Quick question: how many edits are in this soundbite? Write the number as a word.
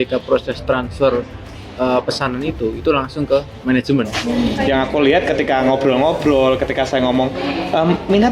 one